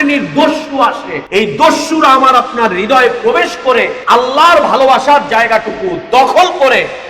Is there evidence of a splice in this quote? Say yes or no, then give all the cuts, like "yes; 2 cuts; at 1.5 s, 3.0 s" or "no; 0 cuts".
yes; 2 cuts; at 1.1 s, 4.0 s